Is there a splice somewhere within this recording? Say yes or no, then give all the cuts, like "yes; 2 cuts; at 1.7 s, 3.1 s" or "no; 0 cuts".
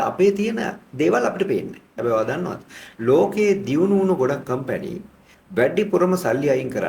yes; 1 cut; at 1.9 s